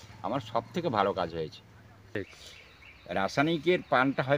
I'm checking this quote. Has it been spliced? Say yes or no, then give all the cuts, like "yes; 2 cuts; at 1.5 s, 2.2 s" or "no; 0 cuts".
yes; 1 cut; at 2.0 s